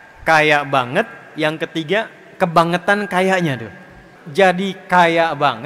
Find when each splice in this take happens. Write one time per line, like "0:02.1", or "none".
0:04.2